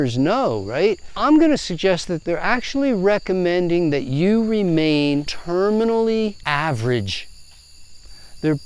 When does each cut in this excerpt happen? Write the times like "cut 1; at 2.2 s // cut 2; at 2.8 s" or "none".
cut 1; at 1.1 s // cut 2; at 2.1 s // cut 3; at 5.4 s // cut 4; at 6.4 s